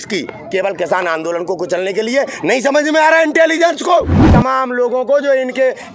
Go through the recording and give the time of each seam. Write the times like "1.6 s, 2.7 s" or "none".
4.2 s